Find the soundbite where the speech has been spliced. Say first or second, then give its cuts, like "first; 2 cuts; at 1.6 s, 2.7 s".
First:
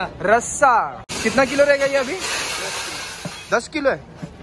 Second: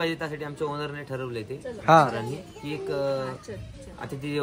first; 1 cut; at 1.0 s